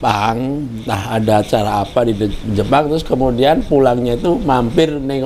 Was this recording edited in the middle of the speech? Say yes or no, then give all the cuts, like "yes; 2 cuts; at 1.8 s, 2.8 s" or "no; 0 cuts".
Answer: no; 0 cuts